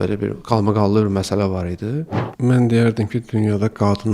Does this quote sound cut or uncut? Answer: cut